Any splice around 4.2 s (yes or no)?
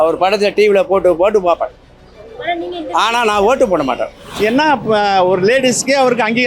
yes